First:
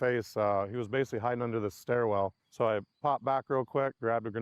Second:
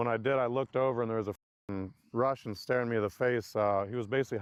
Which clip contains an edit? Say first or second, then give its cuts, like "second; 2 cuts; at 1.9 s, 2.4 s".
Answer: first; 1 cut; at 2.4 s